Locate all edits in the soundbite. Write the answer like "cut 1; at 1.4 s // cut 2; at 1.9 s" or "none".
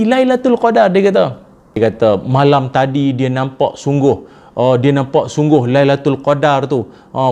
cut 1; at 1.8 s